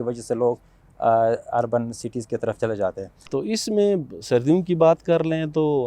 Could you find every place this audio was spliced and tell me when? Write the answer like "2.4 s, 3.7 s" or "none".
3.1 s